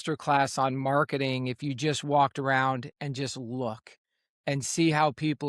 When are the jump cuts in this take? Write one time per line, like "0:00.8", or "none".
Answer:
none